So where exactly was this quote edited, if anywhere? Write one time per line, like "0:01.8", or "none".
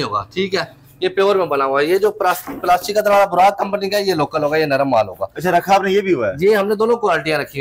none